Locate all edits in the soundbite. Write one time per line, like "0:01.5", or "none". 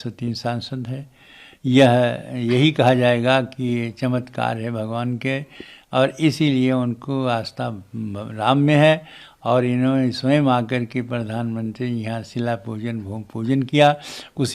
none